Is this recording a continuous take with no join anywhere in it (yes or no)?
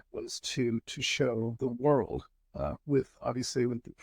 no